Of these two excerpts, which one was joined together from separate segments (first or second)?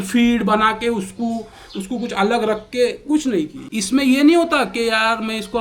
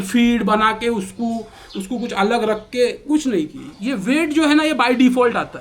first